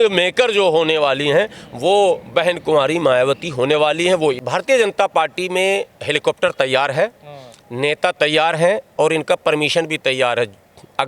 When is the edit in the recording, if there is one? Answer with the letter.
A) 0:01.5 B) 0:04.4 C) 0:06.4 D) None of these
B